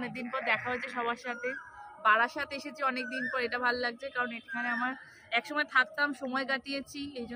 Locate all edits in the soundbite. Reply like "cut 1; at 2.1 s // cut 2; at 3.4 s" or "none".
none